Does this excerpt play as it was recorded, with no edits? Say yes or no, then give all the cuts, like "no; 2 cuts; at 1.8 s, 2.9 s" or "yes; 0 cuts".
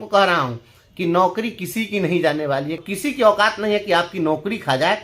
no; 1 cut; at 2.7 s